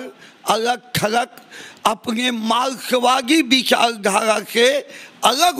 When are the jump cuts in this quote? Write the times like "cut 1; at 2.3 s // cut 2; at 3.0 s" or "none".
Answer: none